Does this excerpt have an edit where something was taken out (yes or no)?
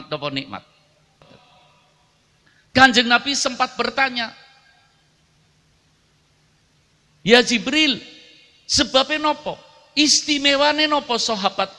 yes